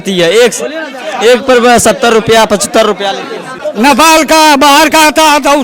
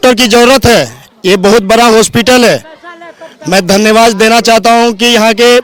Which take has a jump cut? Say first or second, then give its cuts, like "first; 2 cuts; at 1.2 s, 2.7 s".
first; 1 cut; at 3.4 s